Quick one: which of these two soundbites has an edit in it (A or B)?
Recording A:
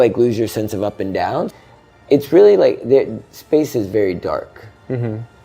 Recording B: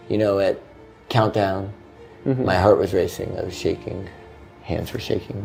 A